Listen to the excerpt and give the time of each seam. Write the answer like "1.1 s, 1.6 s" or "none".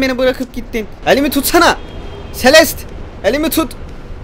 0.9 s